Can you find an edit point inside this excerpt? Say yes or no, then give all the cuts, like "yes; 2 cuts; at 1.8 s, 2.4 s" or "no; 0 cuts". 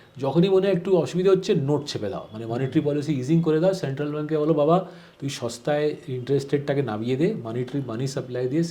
no; 0 cuts